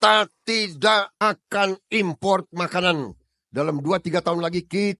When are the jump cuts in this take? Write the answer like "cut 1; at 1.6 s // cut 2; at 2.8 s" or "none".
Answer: none